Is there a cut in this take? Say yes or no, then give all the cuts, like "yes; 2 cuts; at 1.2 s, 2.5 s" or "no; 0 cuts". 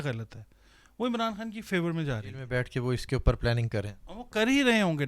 yes; 1 cut; at 2.3 s